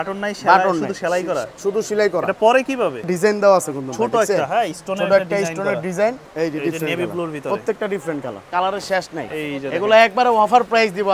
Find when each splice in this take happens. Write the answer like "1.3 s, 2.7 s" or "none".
3.1 s, 6.2 s, 8.4 s